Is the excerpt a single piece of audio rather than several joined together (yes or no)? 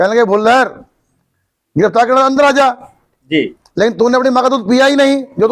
yes